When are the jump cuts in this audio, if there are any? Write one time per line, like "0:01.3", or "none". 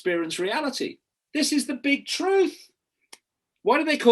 none